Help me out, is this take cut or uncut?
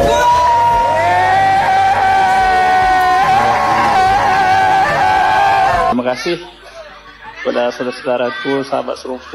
cut